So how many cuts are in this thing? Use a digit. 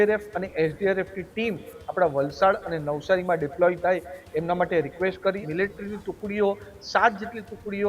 1